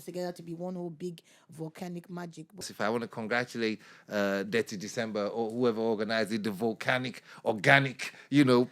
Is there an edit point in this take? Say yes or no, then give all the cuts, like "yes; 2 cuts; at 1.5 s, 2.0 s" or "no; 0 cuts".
yes; 1 cut; at 2.7 s